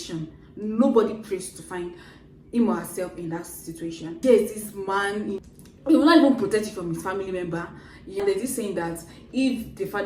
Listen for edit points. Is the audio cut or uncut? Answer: cut